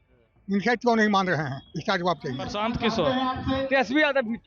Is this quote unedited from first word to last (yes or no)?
no